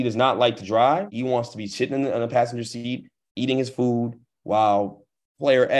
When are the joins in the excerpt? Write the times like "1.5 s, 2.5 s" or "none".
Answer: 1.1 s